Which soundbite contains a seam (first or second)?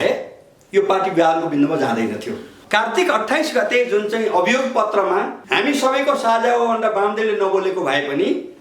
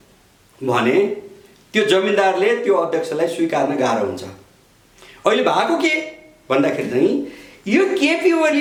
first